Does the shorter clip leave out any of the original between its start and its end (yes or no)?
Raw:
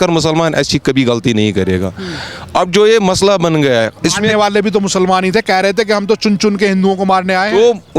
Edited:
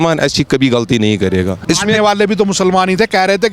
yes